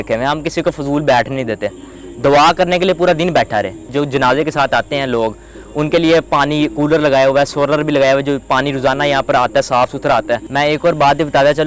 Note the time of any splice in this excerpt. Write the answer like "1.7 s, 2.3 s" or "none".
3.9 s, 10.5 s